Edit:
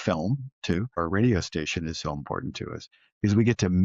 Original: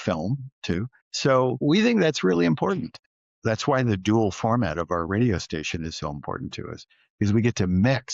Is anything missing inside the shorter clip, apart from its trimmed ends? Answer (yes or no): yes